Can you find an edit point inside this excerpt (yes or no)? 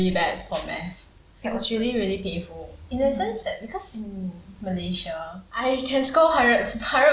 yes